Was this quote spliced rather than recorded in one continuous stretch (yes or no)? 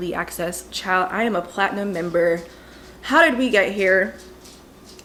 no